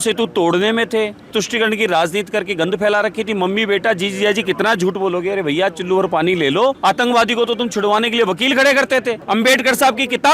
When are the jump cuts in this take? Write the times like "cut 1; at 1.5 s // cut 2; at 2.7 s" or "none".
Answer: cut 1; at 1.3 s // cut 2; at 6.8 s // cut 3; at 9.2 s